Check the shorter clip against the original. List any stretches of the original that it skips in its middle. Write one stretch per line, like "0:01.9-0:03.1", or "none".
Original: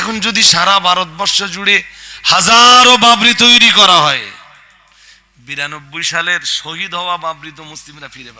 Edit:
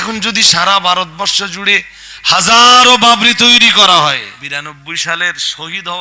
0:04.4-0:05.4